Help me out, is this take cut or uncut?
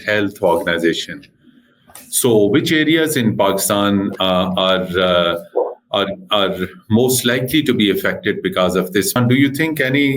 cut